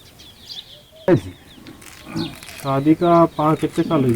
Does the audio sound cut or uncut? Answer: cut